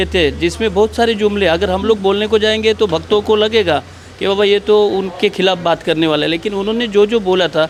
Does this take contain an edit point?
no; 0 cuts

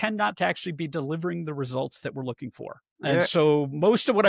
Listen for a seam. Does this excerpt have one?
yes; 1 cut; at 3.2 s

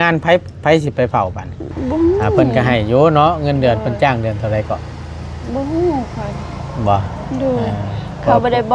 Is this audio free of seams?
no; 1 cut; at 2.5 s

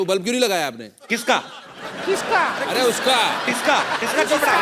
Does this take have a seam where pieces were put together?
no; 0 cuts

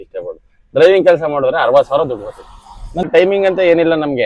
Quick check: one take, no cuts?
no; 1 cut; at 3.1 s

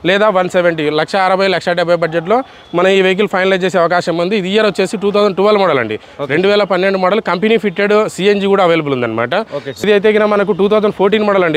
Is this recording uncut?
no; 1 cut; at 9.8 s

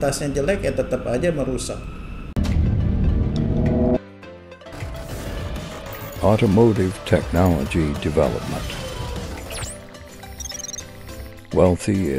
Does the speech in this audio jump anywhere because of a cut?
yes; 1 cut; at 2.2 s

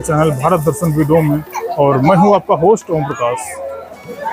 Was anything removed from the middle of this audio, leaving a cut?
no; 0 cuts

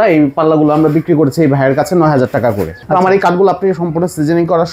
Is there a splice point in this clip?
yes; 1 cut; at 2.7 s

